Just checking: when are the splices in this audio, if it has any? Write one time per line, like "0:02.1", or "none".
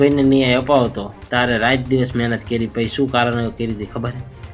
0:01.1